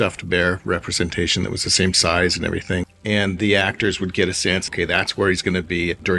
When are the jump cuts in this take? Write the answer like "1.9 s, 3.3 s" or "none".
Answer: 2.8 s, 4.7 s